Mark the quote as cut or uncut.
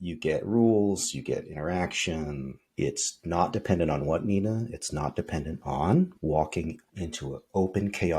cut